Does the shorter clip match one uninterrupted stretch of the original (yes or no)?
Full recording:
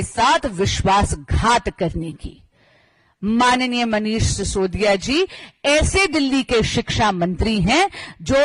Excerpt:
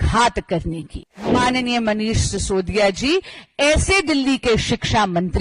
no